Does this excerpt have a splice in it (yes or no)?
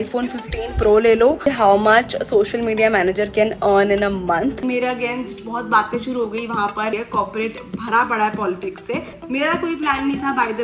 yes